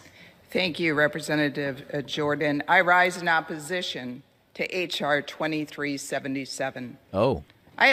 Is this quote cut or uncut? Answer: uncut